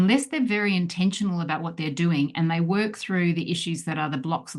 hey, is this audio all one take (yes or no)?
yes